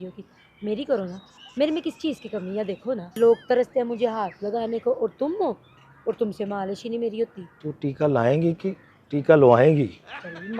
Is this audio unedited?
no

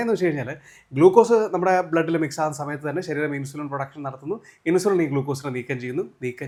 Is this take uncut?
yes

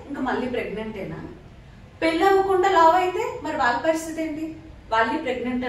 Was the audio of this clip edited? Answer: no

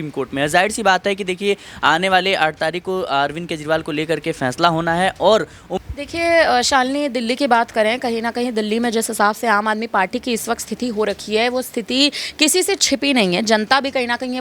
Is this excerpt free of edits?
no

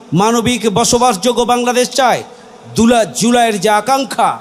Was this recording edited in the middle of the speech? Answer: no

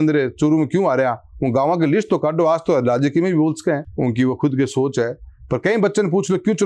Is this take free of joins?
yes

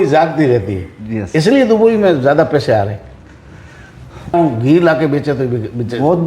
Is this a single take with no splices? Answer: no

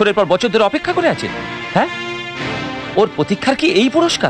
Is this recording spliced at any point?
no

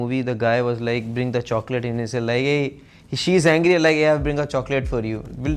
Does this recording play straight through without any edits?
yes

